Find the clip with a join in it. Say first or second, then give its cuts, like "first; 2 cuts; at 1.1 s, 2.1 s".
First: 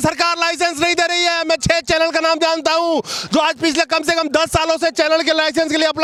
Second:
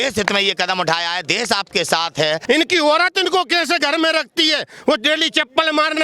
second; 1 cut; at 2.4 s